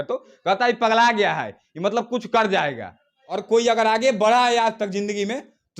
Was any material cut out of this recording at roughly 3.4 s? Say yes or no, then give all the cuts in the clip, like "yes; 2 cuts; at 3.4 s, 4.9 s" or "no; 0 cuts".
yes; 1 cut; at 3.4 s